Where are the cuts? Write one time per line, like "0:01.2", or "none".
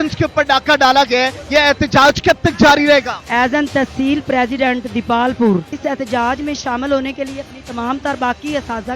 0:01.4
0:03.2
0:05.7